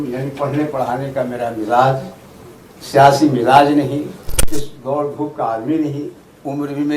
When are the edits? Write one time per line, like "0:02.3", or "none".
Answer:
0:04.3